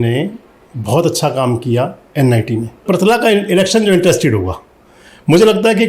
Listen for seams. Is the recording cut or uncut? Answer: cut